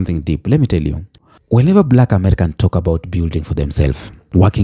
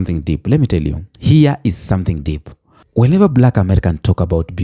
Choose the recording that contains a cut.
first; 1 cut; at 1.1 s

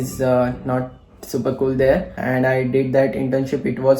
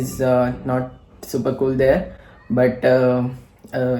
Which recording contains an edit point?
first; 1 cut; at 2.2 s

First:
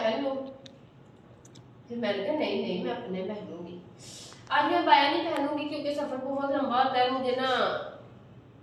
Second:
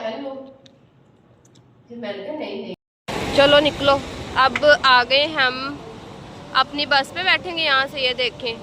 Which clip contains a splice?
second; 1 cut; at 2.8 s

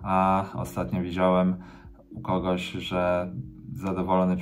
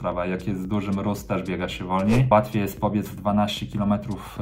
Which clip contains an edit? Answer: second; 1 cut; at 2.3 s

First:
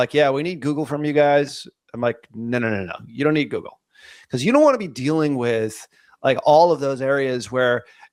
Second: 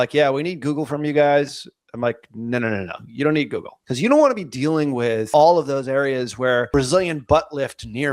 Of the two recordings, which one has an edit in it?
second; 3 cuts; at 3.8 s, 5.3 s, 6.7 s

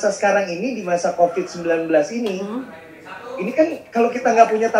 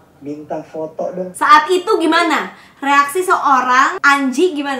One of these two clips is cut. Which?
second; 2 cuts; at 1.3 s, 4.0 s

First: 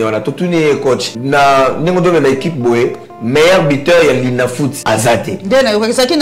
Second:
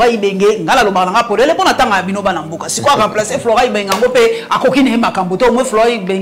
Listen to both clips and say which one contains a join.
first; 2 cuts; at 1.1 s, 4.8 s

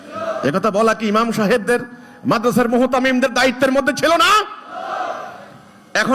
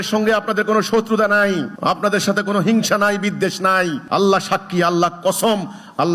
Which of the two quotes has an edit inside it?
second; 2 cuts; at 1.7 s, 4.0 s

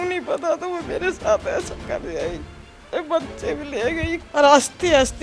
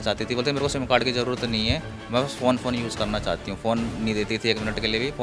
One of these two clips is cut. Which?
first; 1 cut; at 4.3 s

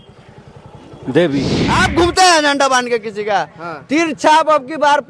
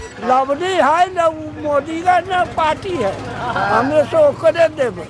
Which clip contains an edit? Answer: first; 1 cut; at 1.6 s

